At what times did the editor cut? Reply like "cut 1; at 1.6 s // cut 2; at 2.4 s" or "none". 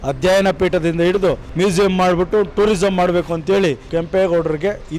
cut 1; at 1.5 s // cut 2; at 3.8 s

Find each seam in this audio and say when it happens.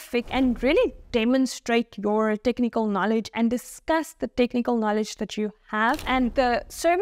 none

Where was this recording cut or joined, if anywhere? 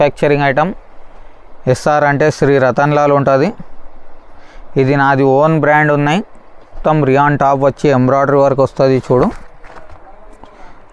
cut 1; at 6.7 s

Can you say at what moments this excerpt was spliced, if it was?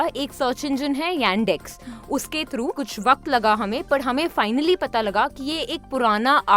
cut 1; at 2.9 s

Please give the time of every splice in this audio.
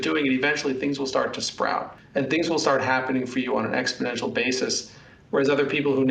cut 1; at 2.0 s

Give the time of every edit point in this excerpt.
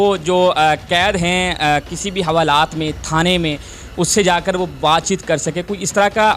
none

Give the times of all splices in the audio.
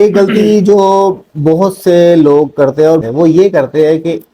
cut 1; at 3.0 s

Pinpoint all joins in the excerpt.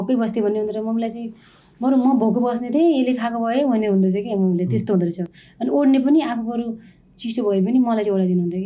none

